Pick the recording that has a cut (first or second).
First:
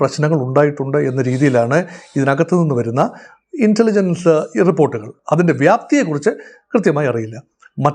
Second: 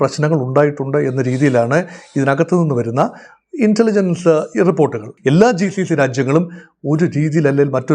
second